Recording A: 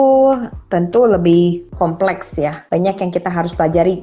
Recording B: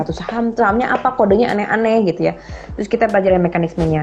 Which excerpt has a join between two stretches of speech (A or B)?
A